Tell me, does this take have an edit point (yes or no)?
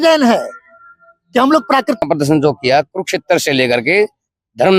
yes